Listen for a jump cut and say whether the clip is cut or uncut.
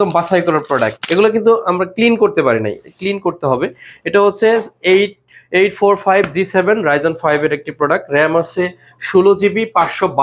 cut